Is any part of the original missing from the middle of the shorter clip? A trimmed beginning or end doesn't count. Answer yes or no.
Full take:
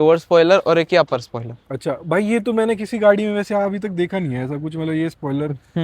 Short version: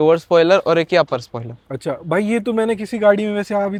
no